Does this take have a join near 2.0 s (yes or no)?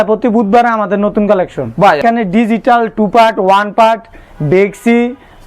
yes